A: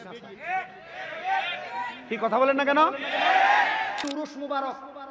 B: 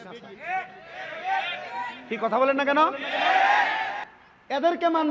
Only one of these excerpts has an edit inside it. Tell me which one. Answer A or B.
A